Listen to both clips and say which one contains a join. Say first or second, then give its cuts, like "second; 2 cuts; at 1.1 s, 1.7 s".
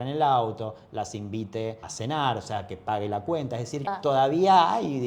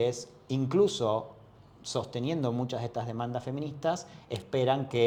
first; 2 cuts; at 1.9 s, 3.9 s